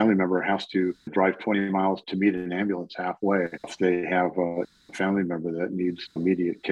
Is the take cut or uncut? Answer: cut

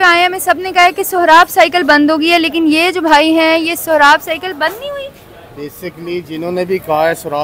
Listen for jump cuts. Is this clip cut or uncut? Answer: uncut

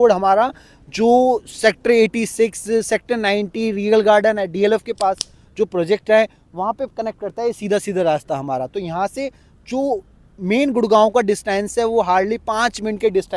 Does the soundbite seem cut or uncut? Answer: uncut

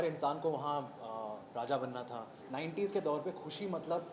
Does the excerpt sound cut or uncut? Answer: cut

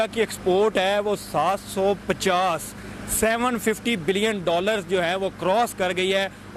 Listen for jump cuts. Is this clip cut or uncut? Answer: uncut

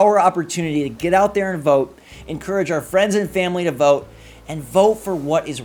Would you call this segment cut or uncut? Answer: uncut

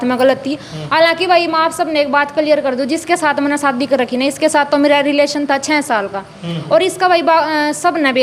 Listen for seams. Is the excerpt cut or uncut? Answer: uncut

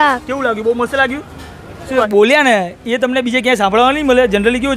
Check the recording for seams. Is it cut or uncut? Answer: cut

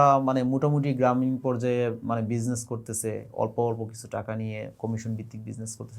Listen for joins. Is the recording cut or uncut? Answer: uncut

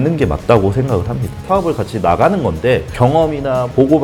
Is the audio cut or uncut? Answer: cut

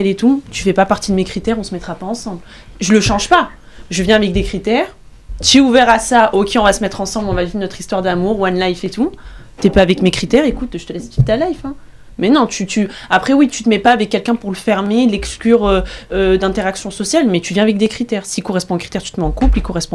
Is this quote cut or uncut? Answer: uncut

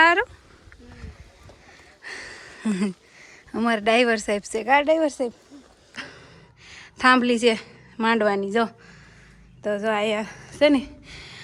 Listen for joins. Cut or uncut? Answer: cut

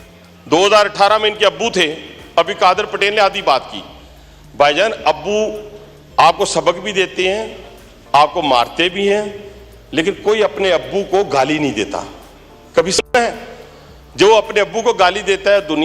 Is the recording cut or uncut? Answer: uncut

